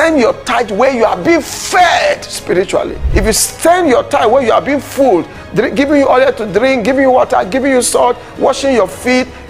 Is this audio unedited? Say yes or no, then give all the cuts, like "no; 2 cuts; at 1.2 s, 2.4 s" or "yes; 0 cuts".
no; 1 cut; at 3.0 s